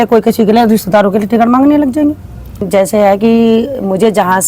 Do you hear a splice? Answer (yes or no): yes